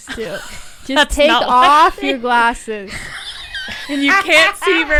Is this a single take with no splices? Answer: yes; 0 cuts

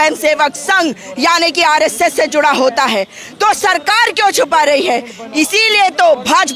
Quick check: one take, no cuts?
yes; 0 cuts

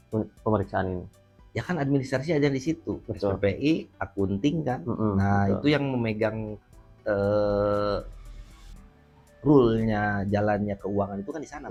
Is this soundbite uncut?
yes; 0 cuts

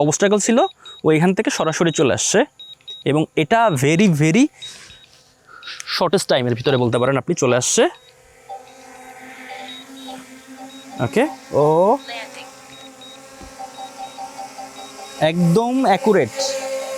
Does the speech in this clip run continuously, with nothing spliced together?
yes; 0 cuts

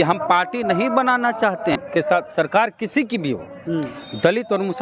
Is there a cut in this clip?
yes; 1 cut; at 1.7 s

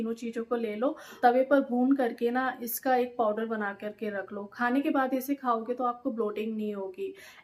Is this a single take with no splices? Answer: yes; 0 cuts

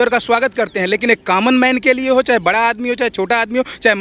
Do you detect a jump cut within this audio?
no; 0 cuts

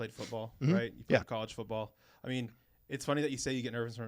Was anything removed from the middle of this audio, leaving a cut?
no; 0 cuts

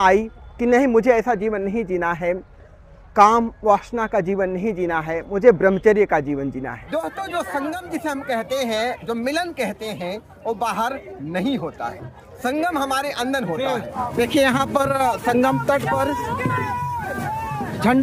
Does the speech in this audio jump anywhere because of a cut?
yes; 2 cuts; at 6.8 s, 13.9 s

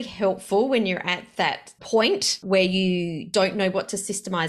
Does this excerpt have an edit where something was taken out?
yes; 3 cuts; at 1.7 s, 2.4 s, 3.3 s

